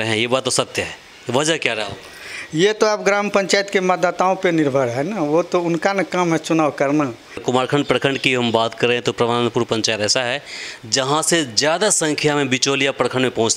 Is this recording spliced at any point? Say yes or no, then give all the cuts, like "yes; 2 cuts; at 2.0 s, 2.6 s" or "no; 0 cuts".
yes; 1 cut; at 7.4 s